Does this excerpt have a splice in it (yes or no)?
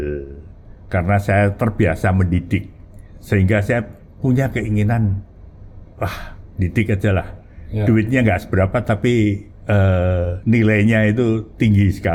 no